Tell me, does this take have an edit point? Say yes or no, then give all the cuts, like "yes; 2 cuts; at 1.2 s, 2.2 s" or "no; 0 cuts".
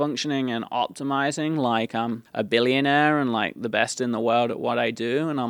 yes; 1 cut; at 2.2 s